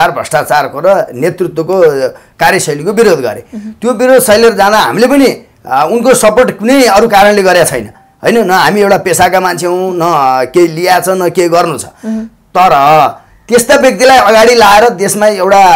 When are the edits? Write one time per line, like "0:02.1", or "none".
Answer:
none